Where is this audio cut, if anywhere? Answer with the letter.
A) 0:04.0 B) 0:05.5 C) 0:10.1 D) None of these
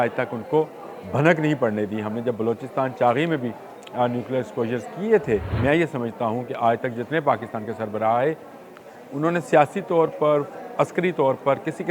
B